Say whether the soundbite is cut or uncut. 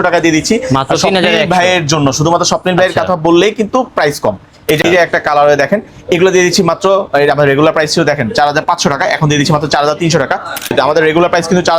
cut